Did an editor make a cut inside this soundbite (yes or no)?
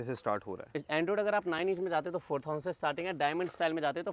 no